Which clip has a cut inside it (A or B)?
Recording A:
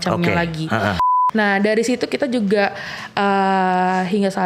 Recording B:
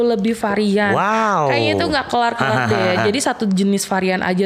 A